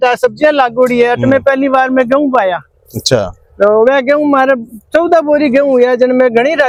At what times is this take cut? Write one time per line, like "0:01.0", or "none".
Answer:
none